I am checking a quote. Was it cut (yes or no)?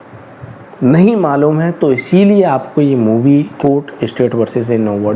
yes